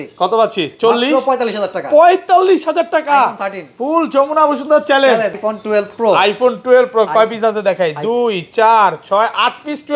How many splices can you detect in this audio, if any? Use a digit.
1